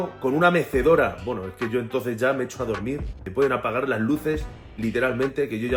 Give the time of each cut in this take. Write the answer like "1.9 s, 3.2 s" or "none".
none